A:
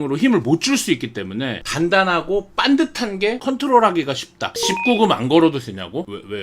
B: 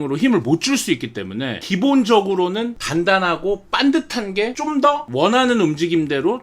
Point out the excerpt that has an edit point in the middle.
A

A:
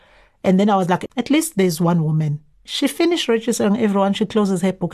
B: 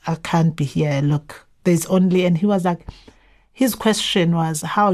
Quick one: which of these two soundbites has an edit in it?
A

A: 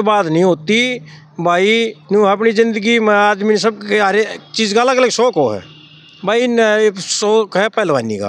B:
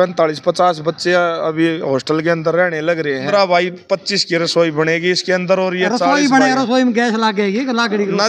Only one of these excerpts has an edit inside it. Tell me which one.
B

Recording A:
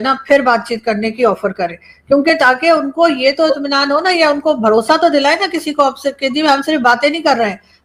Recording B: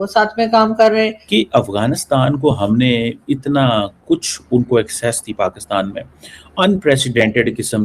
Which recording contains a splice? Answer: B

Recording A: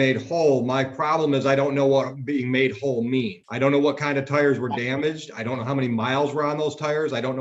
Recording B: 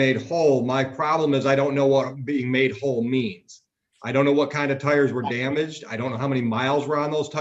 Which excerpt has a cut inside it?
A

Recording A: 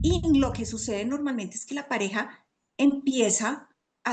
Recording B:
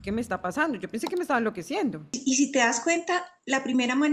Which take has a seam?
B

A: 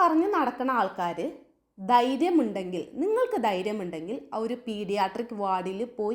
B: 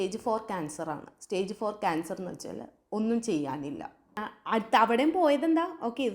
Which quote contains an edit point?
B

